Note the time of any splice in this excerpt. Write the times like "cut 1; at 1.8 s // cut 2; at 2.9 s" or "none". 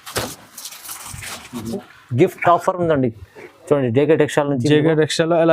cut 1; at 1.8 s

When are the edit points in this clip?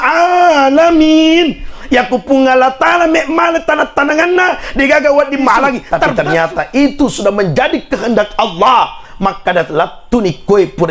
cut 1; at 6.0 s

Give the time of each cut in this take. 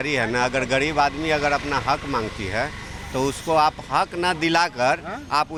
none

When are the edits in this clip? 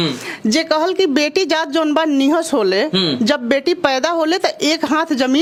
none

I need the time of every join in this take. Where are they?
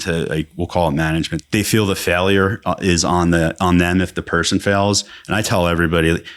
cut 1; at 1.4 s

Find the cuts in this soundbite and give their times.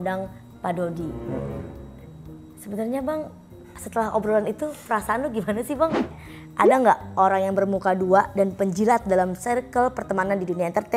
cut 1; at 6.1 s

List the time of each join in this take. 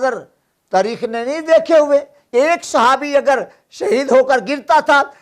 cut 1; at 2.2 s

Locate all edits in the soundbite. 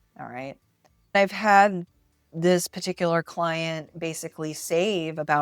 cut 1; at 1.1 s

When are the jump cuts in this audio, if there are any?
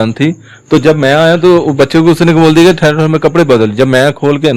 none

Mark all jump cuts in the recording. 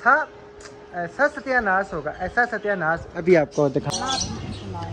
cut 1; at 3.9 s

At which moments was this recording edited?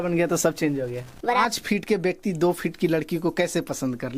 cut 1; at 1.4 s

